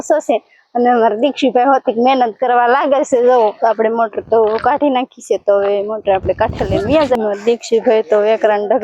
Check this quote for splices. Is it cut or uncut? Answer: cut